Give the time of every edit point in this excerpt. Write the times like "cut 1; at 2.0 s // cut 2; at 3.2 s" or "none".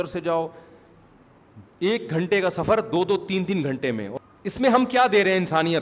cut 1; at 4.1 s